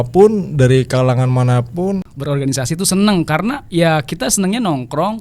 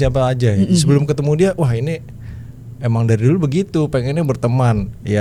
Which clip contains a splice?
first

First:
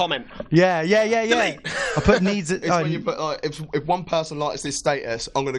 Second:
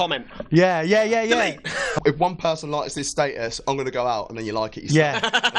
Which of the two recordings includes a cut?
second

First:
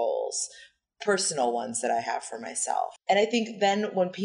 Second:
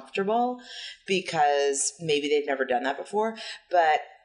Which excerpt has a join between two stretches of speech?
first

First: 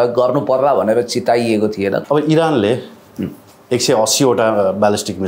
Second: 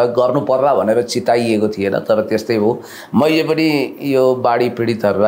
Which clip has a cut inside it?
first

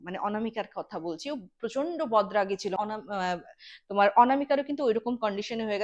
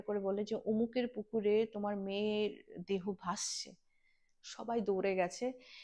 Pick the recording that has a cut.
first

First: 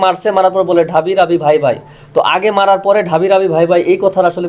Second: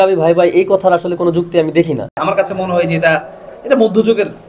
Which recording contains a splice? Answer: second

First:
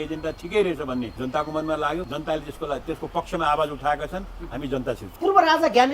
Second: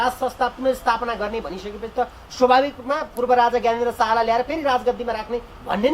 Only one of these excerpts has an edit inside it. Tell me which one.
first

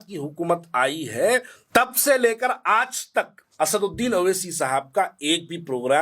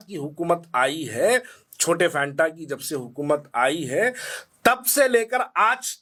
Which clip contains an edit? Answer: first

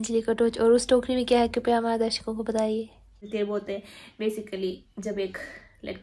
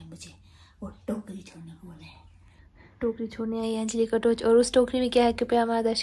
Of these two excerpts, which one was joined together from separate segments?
first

